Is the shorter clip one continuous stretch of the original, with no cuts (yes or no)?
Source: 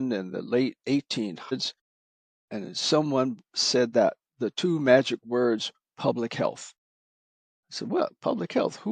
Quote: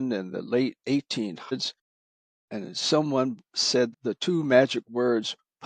no